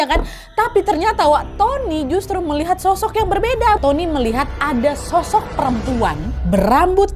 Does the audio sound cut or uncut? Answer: cut